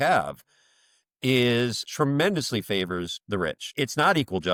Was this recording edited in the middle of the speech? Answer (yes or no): no